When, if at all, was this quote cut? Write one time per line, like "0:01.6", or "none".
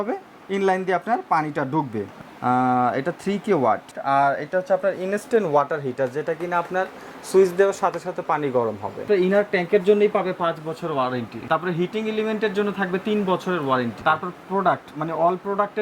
0:02.1
0:03.9
0:09.0
0:11.3
0:14.0

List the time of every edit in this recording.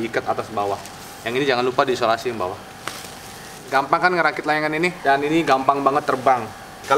none

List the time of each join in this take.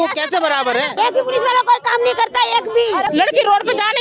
0:00.9
0:03.1

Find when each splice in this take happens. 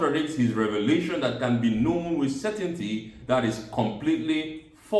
none

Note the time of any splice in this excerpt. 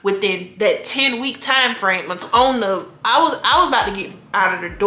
0:02.2

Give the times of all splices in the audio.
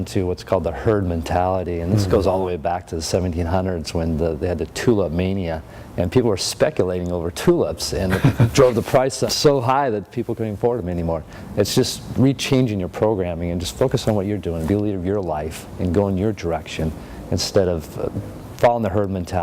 0:09.3
0:11.4

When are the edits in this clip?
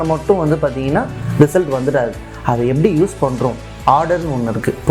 none

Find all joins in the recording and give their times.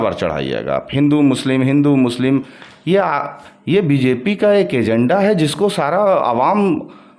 none

